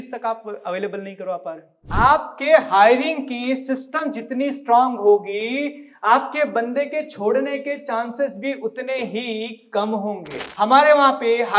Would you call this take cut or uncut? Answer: cut